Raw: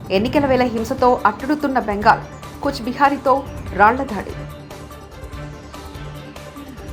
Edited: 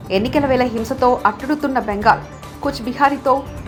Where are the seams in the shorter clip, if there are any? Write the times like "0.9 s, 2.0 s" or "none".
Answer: none